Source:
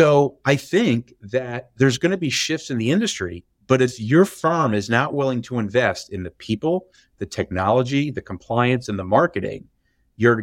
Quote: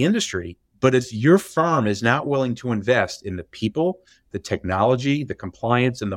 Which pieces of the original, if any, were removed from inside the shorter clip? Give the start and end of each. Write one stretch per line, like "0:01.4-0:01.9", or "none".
none